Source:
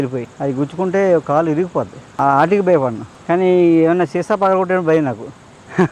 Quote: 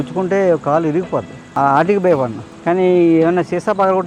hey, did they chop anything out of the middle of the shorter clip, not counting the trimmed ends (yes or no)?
no